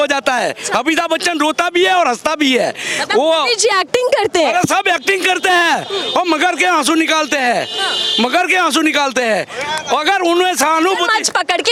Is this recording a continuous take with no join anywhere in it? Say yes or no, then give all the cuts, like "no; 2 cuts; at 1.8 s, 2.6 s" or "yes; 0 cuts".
yes; 0 cuts